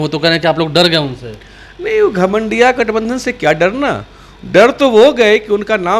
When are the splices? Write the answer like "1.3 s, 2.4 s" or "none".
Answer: none

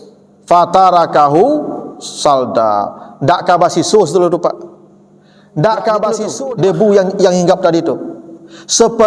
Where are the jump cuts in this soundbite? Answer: 6.4 s

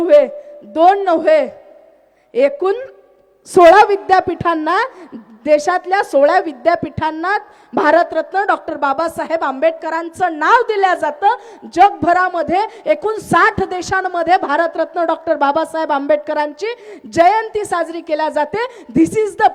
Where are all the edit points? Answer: none

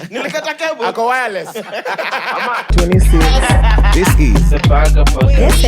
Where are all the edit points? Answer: 2.7 s

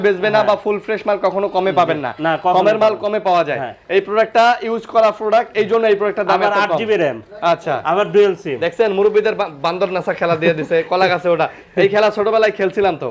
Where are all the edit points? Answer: none

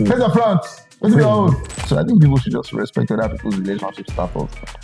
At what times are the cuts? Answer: 1.9 s

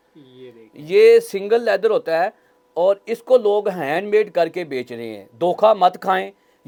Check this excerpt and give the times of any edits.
none

